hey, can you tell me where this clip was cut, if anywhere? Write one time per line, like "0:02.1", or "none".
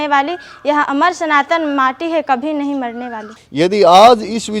0:03.4